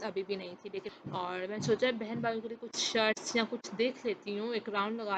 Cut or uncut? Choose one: cut